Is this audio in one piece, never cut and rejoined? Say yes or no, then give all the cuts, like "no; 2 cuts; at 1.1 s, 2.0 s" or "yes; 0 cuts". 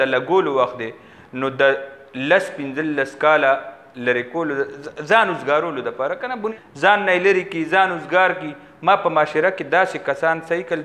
no; 1 cut; at 6.4 s